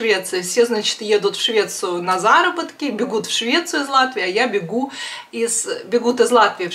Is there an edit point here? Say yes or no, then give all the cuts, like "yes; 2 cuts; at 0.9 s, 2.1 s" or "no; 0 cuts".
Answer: no; 0 cuts